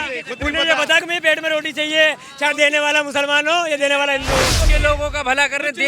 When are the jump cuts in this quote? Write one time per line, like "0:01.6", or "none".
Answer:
0:04.6